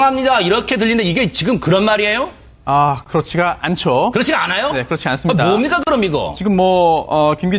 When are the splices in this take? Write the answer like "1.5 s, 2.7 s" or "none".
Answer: 5.1 s